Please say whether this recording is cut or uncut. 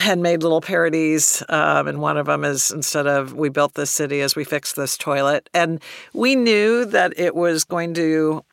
cut